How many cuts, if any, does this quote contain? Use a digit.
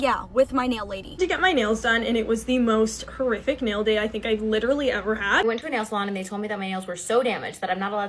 2